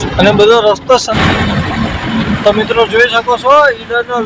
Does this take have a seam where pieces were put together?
yes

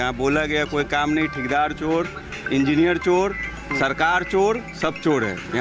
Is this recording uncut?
yes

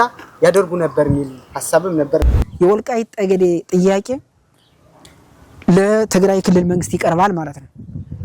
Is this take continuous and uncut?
no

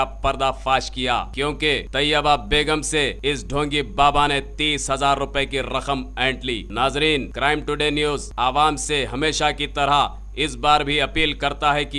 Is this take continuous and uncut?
no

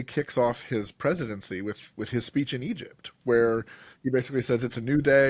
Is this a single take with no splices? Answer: yes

